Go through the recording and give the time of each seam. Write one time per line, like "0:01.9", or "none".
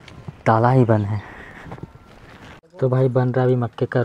0:02.6